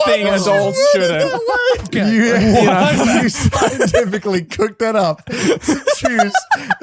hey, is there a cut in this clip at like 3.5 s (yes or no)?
no